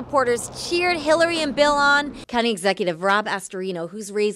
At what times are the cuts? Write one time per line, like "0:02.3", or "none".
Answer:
0:02.2